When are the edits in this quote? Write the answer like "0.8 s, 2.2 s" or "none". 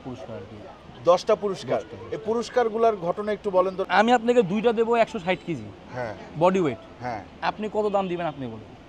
3.8 s